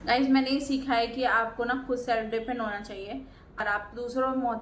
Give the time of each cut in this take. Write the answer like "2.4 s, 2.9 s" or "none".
3.6 s